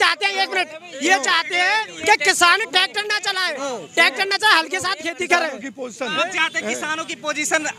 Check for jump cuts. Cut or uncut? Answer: uncut